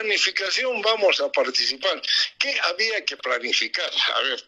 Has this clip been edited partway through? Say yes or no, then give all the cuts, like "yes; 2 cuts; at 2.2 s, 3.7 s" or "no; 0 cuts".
no; 0 cuts